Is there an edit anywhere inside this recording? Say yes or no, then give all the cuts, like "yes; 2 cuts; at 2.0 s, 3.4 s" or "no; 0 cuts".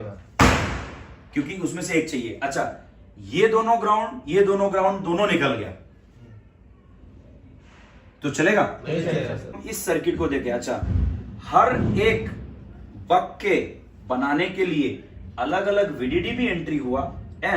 yes; 1 cut; at 9.5 s